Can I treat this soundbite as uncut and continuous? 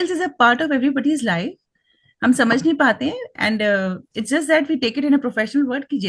yes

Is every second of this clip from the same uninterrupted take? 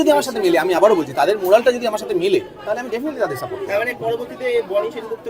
yes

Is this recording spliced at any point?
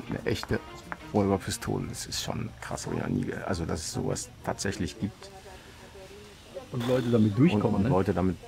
no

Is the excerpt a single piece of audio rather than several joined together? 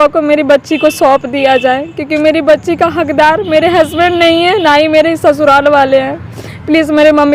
yes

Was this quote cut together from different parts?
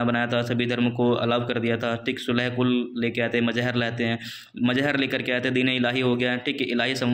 no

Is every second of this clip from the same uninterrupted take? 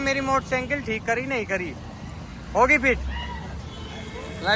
yes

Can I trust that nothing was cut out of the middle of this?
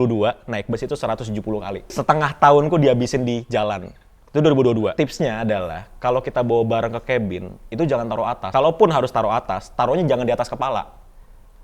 no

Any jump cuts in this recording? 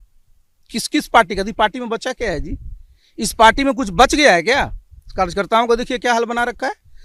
no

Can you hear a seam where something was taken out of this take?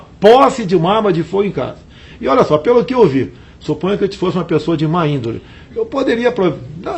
no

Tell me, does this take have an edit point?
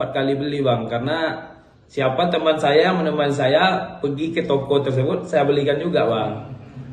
no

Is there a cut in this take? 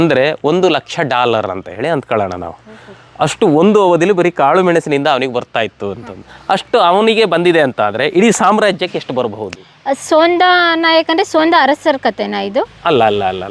no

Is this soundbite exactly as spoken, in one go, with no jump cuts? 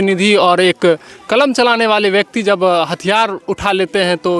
yes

